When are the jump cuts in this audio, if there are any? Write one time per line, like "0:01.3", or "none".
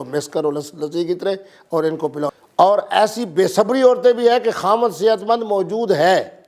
0:02.3

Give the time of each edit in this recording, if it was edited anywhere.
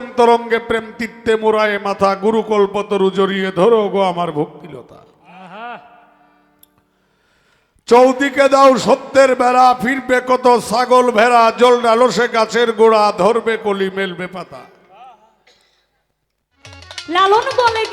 0:16.9

